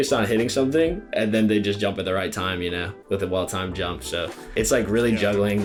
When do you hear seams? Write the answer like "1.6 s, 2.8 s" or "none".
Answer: none